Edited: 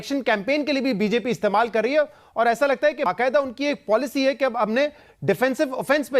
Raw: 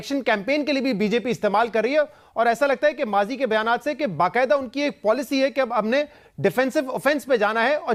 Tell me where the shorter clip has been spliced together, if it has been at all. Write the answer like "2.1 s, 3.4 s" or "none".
3.1 s